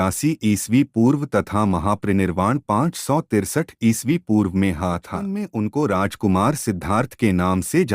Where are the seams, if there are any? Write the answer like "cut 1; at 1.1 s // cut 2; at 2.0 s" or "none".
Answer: cut 1; at 5.3 s